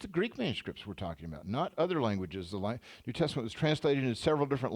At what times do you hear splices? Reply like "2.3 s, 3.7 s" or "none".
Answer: none